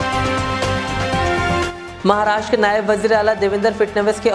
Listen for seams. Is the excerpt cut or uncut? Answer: cut